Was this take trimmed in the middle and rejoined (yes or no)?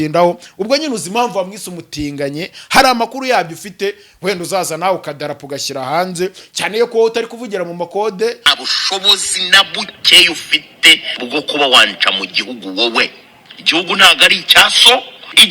yes